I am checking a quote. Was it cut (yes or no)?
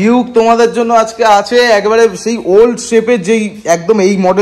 no